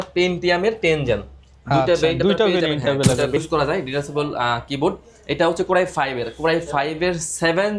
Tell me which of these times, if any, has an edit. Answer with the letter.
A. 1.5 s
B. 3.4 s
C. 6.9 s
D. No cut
B